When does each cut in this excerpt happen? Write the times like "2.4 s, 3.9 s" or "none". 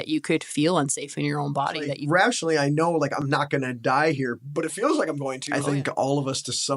2.0 s, 5.5 s